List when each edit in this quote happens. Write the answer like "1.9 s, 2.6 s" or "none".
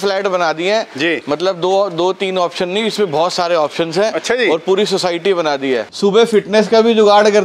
5.9 s